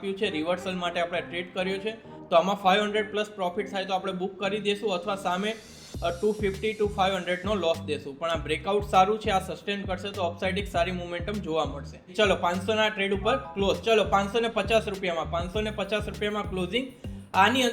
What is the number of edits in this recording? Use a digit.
2